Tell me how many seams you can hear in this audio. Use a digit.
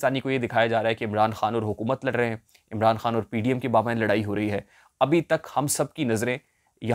0